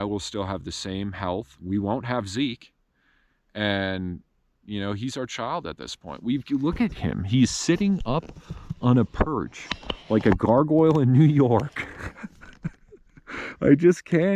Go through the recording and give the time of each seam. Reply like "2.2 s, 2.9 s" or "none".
none